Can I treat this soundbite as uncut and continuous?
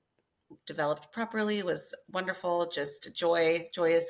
yes; 0 cuts

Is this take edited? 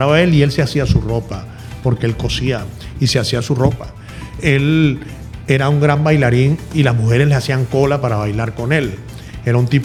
no; 0 cuts

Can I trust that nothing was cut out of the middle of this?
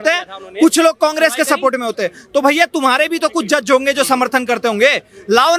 yes; 0 cuts

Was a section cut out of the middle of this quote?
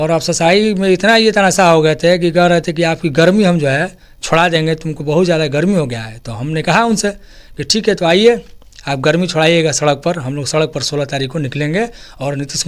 no; 0 cuts

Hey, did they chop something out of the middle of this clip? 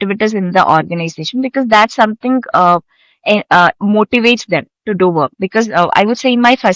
no; 0 cuts

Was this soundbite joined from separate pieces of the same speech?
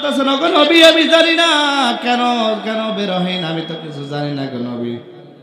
no; 0 cuts

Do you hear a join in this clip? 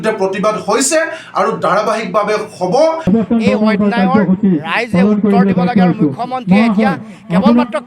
yes; 1 cut; at 3.0 s

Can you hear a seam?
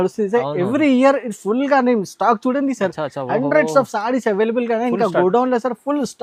no; 0 cuts

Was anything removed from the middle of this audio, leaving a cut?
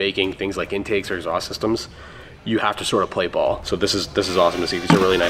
yes; 1 cut; at 3.6 s

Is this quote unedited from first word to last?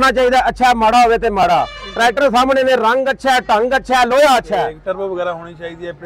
no; 1 cut; at 4.8 s

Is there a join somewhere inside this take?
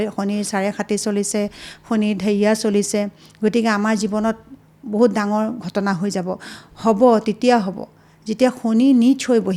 no; 0 cuts

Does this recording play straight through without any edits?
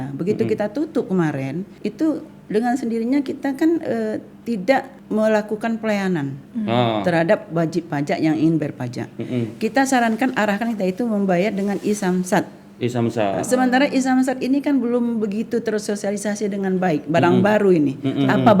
yes; 0 cuts

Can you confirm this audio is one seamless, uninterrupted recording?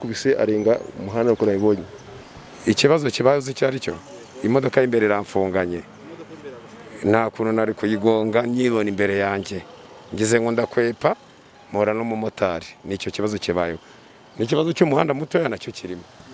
no; 1 cut; at 2.3 s

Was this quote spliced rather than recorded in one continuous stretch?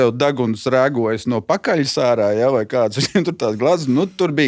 no; 0 cuts

